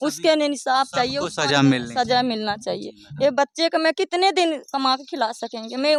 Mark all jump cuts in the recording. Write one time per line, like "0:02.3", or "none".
none

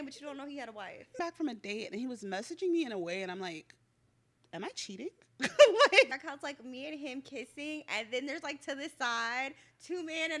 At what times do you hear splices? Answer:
0:01.2
0:06.1

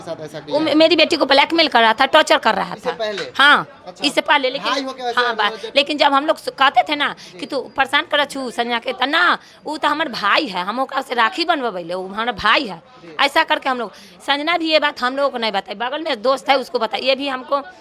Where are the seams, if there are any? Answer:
none

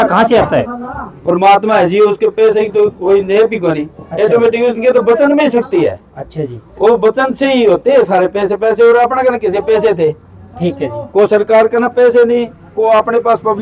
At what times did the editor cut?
none

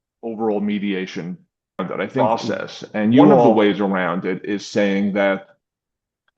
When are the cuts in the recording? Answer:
0:03.5

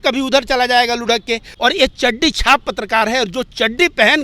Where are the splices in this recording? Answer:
0:01.4

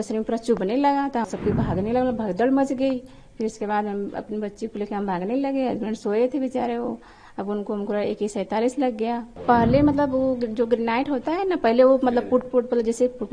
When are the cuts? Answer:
0:01.3
0:09.3

